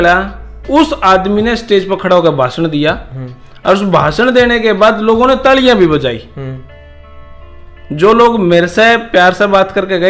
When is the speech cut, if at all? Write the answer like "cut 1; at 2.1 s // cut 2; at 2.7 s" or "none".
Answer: none